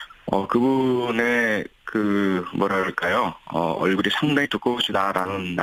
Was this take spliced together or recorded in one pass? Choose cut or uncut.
uncut